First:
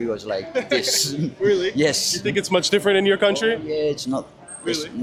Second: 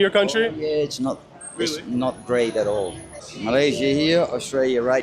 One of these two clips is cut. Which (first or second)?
second